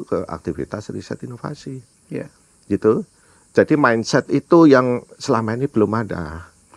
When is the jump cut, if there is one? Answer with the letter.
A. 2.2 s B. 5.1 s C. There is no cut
C